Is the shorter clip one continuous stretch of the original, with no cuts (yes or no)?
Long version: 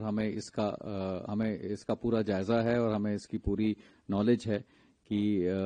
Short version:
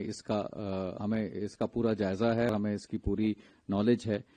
no